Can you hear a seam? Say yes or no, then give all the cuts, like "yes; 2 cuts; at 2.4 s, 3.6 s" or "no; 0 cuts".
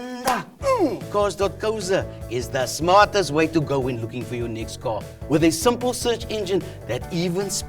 yes; 1 cut; at 1.0 s